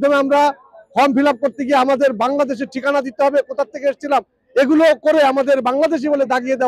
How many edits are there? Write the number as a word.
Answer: zero